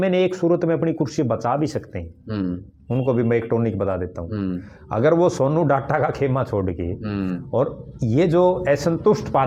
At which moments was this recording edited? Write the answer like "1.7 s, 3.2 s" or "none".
none